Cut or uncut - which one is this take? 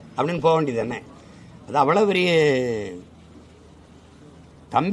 uncut